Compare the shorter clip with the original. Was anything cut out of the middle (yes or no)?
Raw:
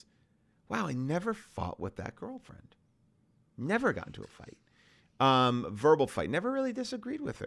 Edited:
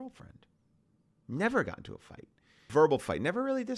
yes